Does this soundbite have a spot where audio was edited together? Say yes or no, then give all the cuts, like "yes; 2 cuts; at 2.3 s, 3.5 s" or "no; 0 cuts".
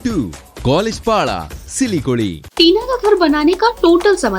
yes; 1 cut; at 2.4 s